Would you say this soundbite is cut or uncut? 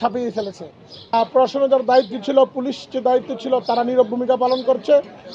cut